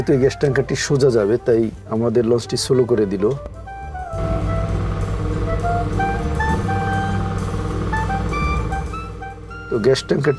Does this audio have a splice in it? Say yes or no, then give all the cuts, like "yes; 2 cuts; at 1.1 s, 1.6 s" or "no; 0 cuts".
no; 0 cuts